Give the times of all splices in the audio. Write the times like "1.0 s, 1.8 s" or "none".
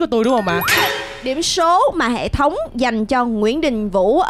1.1 s